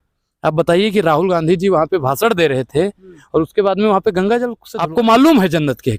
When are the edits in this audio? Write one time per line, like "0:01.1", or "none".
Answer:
0:04.6